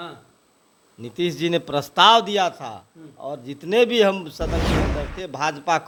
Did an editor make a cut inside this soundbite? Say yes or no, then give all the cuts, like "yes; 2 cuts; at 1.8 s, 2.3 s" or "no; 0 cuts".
no; 0 cuts